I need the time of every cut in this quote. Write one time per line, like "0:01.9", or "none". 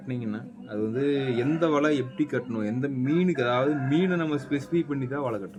none

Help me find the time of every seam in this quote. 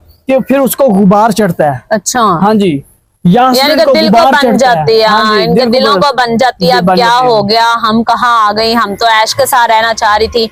none

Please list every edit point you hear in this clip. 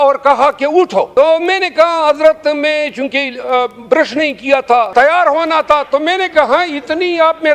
0:01.1
0:04.9

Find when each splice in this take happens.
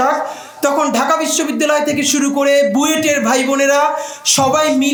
none

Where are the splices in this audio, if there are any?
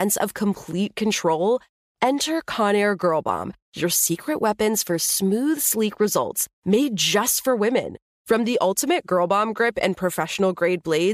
none

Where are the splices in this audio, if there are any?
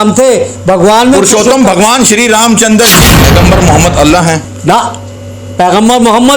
0:03.2

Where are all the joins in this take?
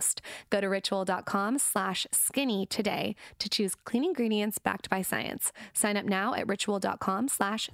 none

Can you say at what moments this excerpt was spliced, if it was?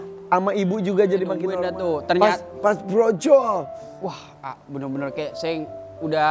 0:01.5

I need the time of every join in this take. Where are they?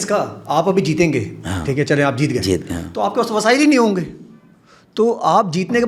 none

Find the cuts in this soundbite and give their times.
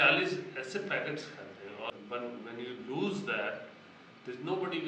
0:01.9

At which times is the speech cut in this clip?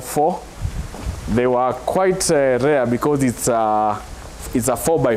none

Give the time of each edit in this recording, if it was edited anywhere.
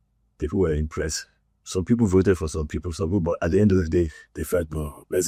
none

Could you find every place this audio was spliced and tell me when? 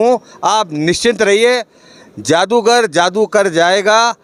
none

